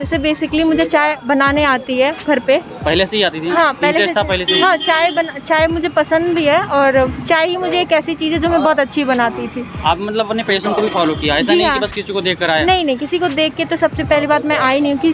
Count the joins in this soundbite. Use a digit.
0